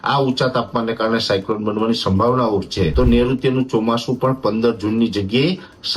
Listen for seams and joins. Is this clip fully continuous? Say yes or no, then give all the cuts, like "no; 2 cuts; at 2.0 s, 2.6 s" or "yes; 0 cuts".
no; 1 cut; at 2.9 s